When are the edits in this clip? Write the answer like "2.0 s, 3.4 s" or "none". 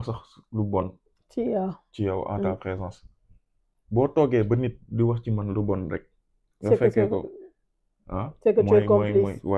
none